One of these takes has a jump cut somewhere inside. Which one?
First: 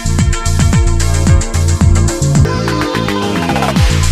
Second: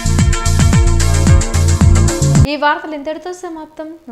first; 1 cut; at 2.5 s

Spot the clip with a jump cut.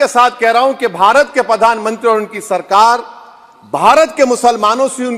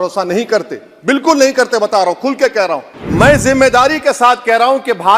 second; 1 cut; at 3.0 s

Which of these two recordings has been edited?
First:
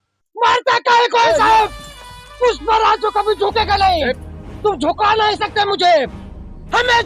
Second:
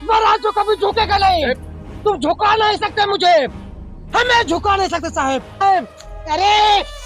second; 1 cut; at 5.6 s

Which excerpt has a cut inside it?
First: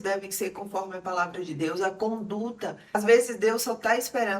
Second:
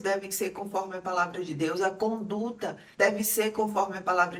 first; 1 cut; at 2.9 s

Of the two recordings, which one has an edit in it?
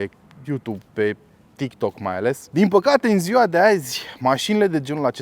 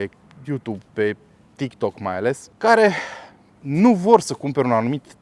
first; 1 cut; at 2.4 s

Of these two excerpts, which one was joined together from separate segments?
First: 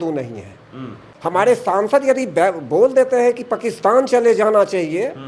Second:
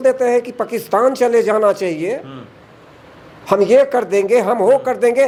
first; 1 cut; at 1.1 s

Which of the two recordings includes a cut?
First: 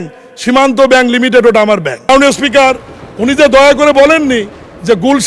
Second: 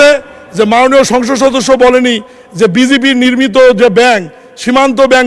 first; 1 cut; at 2.1 s

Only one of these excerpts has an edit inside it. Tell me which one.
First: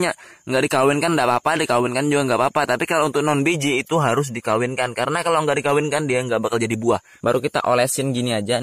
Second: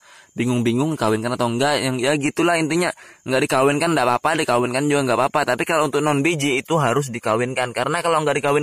first; 1 cut; at 7.1 s

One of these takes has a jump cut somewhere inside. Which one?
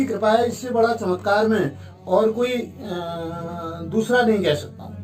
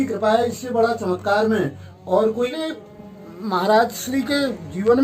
second; 1 cut; at 2.5 s

